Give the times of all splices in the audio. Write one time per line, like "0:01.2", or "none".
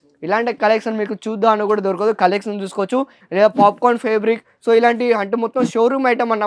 none

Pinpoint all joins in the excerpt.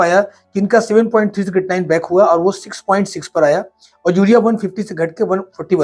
none

